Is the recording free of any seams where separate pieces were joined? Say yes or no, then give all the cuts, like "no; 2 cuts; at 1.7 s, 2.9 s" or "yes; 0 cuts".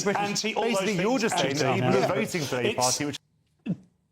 no; 1 cut; at 3.2 s